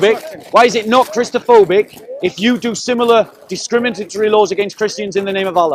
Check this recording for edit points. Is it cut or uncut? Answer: uncut